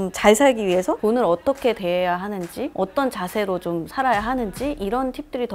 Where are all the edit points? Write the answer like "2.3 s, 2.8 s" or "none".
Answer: none